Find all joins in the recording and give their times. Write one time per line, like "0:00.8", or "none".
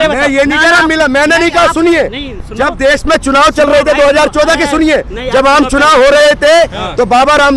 none